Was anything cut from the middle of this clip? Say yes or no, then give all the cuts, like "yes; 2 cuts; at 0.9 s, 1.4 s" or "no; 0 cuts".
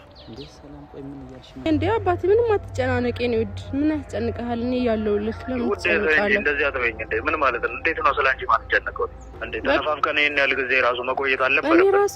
yes; 2 cuts; at 1.7 s, 9.8 s